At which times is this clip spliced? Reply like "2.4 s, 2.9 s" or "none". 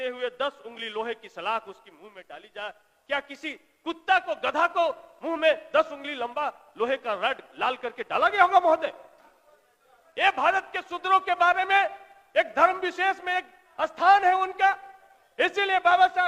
none